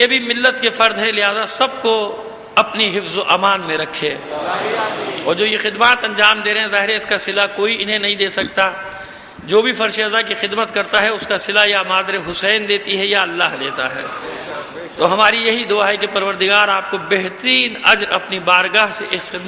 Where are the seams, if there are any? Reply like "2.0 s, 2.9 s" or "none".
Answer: none